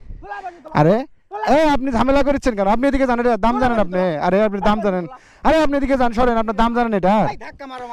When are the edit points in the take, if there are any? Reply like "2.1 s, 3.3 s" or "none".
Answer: none